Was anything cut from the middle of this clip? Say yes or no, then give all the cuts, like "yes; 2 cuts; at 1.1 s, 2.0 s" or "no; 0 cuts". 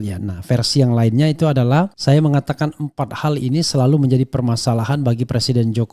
yes; 1 cut; at 2.0 s